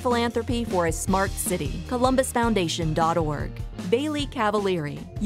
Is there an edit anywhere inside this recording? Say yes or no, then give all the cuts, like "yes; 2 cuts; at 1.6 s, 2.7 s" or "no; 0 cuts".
no; 0 cuts